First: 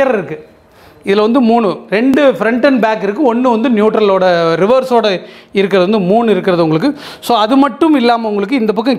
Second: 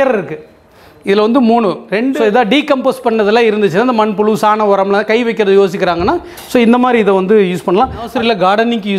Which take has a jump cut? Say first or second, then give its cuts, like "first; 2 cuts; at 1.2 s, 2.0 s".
second; 2 cuts; at 2.1 s, 8.1 s